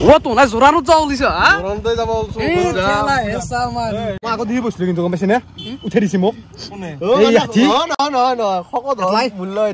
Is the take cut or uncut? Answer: cut